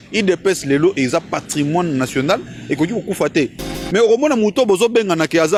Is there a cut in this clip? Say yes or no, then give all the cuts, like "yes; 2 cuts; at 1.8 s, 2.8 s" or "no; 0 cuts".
no; 0 cuts